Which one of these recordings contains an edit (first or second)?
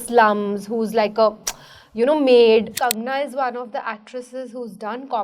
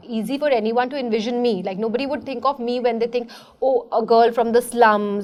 first